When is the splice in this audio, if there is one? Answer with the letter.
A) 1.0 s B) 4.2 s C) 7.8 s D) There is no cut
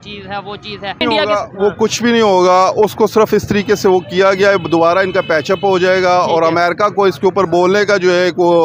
A